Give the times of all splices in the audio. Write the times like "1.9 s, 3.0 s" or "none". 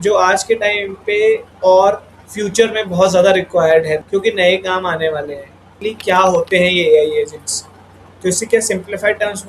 1.5 s, 4.0 s, 5.7 s